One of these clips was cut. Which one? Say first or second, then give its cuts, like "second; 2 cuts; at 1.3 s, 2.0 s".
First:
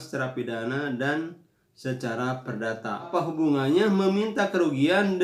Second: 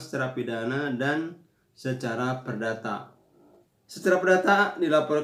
first; 1 cut; at 3.1 s